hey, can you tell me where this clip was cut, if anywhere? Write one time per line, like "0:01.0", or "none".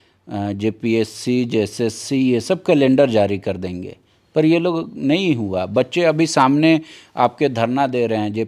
none